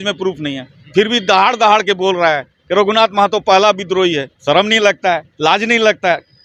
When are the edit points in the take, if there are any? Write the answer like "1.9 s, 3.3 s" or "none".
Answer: none